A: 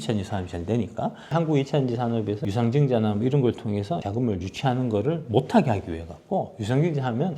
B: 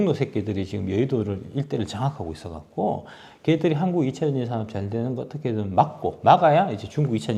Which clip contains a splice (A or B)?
A